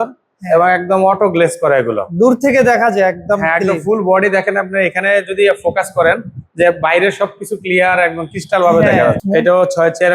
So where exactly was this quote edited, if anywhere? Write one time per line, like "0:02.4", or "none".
0:09.2